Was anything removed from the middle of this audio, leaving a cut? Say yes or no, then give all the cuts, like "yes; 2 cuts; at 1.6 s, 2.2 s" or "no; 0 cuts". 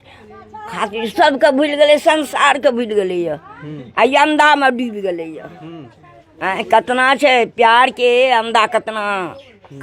no; 0 cuts